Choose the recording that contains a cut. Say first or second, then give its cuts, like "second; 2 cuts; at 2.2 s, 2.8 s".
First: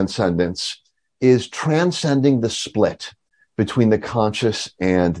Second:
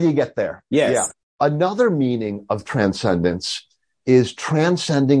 second; 1 cut; at 1.1 s